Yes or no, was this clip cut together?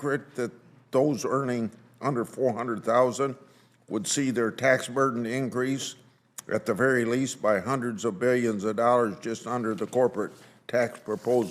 no